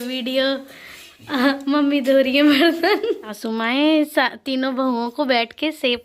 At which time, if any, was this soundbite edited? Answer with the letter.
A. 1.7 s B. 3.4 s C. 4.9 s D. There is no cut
B